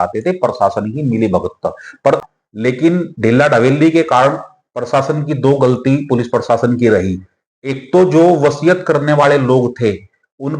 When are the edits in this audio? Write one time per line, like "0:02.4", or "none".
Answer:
0:02.2